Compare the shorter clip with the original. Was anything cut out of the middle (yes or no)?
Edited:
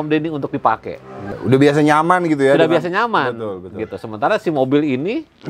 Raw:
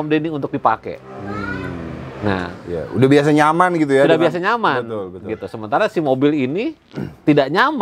yes